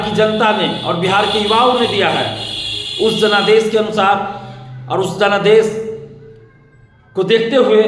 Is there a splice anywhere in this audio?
no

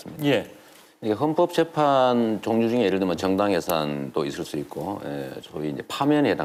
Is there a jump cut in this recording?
no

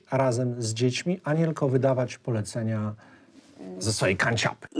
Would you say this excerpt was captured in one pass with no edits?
yes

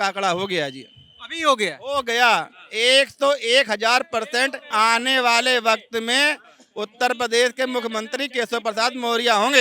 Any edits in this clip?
yes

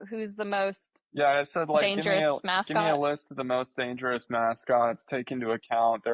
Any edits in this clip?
no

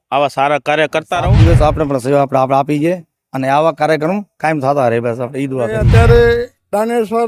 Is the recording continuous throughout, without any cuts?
no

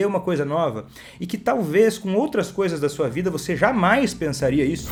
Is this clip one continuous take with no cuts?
yes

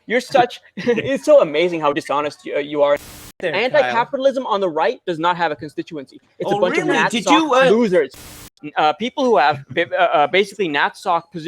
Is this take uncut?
no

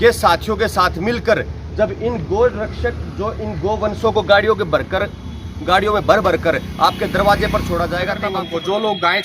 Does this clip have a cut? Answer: yes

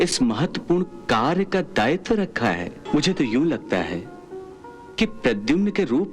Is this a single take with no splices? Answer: no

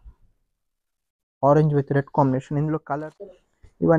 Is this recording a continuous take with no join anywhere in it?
no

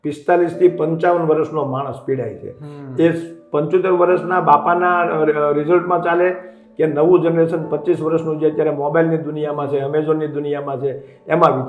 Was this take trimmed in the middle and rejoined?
no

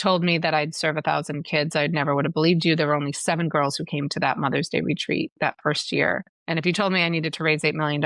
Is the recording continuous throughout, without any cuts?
no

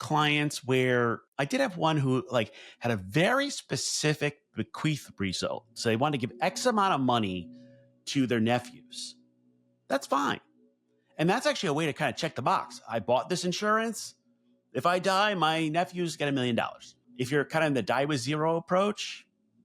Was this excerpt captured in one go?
no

